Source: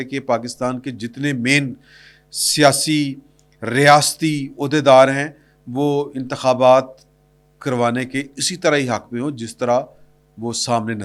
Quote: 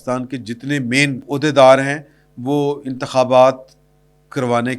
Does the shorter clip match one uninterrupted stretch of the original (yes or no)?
no